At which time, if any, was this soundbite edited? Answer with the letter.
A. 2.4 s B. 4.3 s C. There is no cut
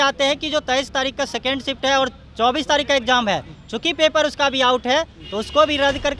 C